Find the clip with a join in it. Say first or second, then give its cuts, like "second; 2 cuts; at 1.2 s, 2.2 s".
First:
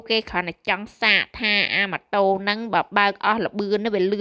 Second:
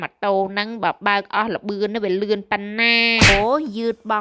second; 1 cut; at 3.3 s